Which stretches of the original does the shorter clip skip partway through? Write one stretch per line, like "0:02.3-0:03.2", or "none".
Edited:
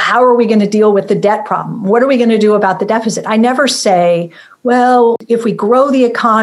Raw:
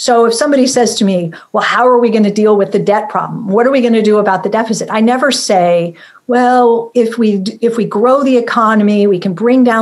0:06.9-0:07.5